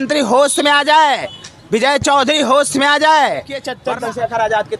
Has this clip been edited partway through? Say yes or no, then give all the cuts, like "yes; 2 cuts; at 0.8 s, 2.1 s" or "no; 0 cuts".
yes; 1 cut; at 3.7 s